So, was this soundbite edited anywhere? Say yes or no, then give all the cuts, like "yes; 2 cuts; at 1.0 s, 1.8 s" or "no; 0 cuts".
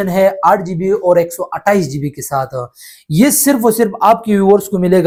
no; 0 cuts